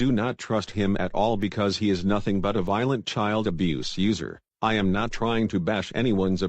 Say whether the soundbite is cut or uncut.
cut